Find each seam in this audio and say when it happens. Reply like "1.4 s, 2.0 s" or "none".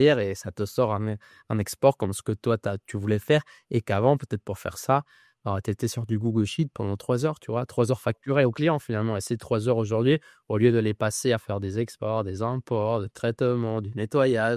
none